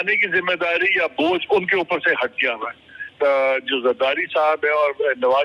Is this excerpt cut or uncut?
cut